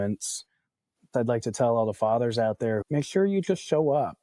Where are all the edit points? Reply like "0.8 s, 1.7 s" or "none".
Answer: 1.1 s, 2.8 s